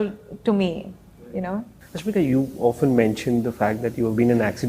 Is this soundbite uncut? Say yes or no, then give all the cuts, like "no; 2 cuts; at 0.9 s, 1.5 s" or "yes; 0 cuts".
yes; 0 cuts